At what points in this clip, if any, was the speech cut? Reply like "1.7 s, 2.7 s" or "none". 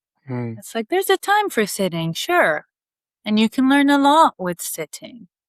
none